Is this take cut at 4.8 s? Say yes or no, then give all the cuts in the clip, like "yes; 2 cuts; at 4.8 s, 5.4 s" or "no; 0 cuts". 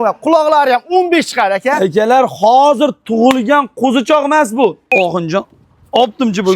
yes; 1 cut; at 4.8 s